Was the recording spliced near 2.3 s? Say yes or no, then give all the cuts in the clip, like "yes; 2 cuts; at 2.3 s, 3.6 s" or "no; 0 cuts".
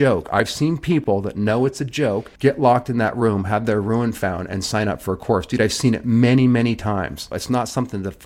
yes; 2 cuts; at 2.3 s, 7.3 s